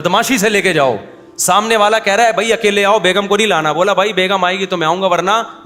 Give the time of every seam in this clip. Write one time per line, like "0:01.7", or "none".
none